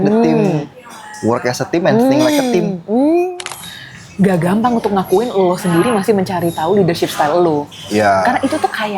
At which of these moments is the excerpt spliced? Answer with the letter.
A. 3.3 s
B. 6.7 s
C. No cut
A